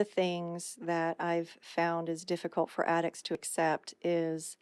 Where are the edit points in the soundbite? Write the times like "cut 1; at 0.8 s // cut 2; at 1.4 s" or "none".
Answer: cut 1; at 3.5 s